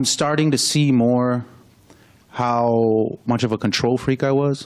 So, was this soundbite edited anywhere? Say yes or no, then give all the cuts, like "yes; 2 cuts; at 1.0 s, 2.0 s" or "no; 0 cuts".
no; 0 cuts